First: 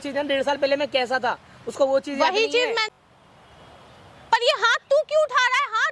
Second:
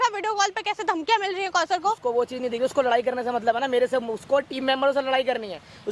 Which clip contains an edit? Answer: first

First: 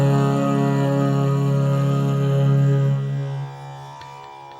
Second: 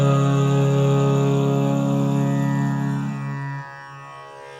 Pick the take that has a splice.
first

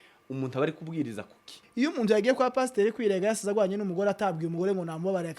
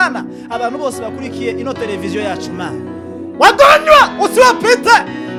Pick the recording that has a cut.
first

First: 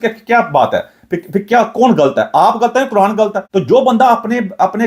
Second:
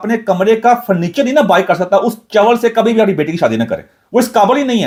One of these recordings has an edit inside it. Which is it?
first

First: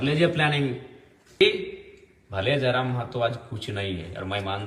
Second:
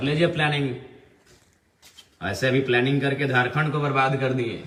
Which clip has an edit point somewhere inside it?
first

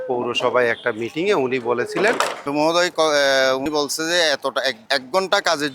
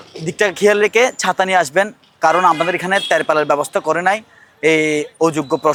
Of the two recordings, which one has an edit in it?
first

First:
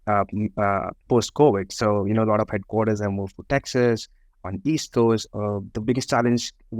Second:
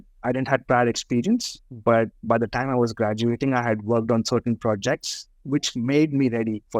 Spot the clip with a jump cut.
first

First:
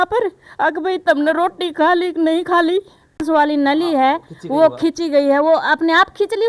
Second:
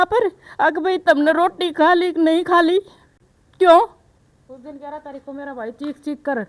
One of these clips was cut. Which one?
first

